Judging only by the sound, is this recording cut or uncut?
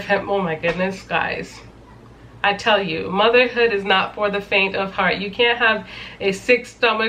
uncut